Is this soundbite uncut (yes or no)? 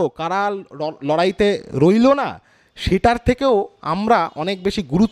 yes